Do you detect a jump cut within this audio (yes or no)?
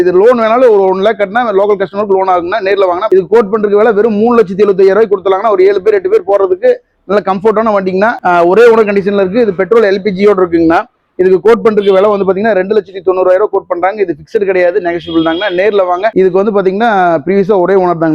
yes